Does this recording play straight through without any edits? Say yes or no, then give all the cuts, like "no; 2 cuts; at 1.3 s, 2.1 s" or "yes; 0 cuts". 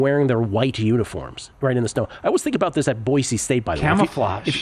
yes; 0 cuts